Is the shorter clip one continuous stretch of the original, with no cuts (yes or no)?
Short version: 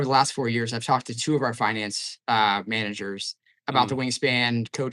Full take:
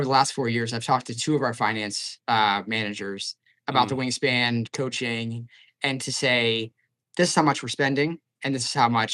yes